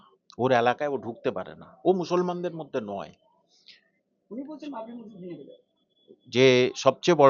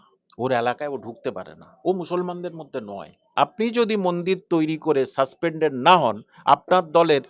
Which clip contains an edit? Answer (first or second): second